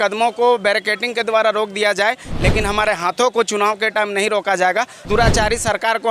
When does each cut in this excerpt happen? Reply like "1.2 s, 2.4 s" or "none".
5.0 s